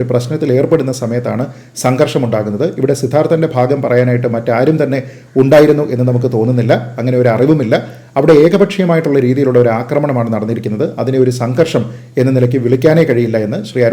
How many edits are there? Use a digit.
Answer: 0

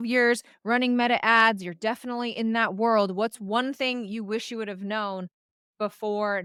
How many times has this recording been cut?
0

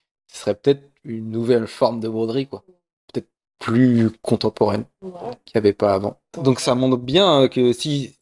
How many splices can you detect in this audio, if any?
1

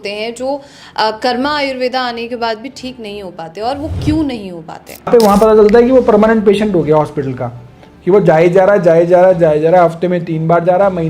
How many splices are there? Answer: 1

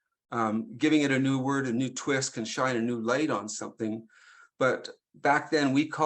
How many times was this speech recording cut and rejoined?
0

